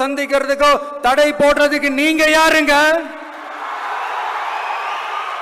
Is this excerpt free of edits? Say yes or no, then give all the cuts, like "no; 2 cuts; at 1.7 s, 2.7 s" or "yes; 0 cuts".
yes; 0 cuts